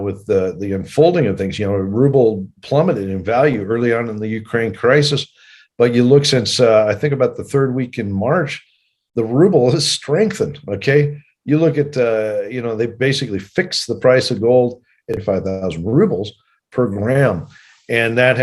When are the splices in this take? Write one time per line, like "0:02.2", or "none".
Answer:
0:15.2